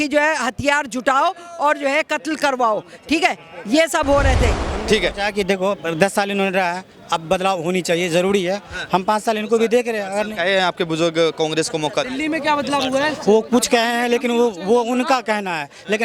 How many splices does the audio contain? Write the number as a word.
one